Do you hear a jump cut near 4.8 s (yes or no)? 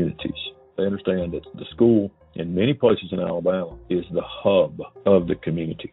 yes